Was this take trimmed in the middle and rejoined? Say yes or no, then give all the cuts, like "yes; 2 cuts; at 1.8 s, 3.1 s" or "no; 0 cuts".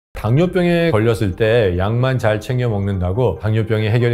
yes; 1 cut; at 0.9 s